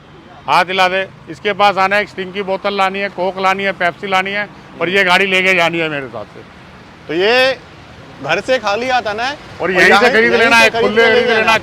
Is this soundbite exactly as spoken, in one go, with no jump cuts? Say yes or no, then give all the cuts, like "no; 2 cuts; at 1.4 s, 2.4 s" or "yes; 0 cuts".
yes; 0 cuts